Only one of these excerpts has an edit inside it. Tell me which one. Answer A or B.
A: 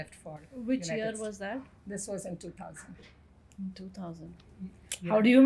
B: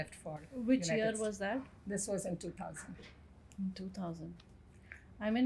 A